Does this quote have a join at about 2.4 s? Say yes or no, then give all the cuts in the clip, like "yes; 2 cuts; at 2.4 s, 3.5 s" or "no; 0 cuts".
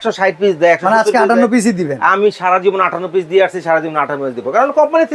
no; 0 cuts